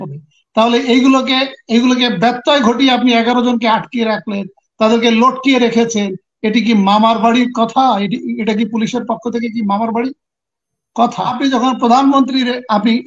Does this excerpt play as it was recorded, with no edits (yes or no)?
no